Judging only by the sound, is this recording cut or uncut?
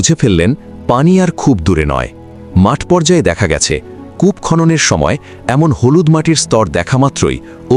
uncut